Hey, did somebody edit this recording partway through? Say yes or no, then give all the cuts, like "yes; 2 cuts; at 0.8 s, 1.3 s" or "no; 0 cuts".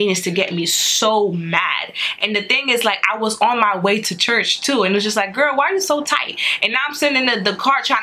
no; 0 cuts